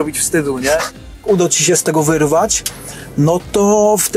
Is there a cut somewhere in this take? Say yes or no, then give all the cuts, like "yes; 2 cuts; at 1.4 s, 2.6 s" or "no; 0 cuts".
yes; 1 cut; at 1.2 s